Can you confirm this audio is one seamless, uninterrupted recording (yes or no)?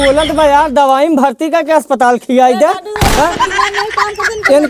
yes